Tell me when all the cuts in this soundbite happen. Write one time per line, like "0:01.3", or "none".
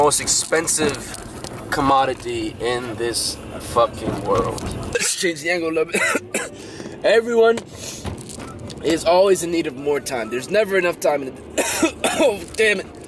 0:04.9